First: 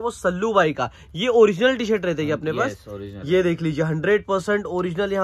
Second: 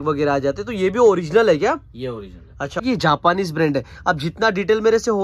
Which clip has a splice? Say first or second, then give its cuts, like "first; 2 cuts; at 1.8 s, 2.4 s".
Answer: second; 1 cut; at 2.8 s